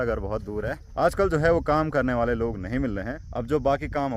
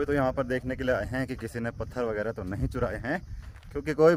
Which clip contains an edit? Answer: first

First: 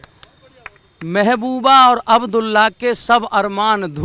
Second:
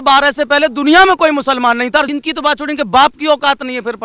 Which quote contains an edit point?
second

